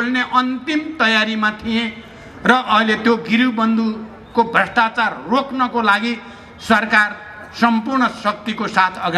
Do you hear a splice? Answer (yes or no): no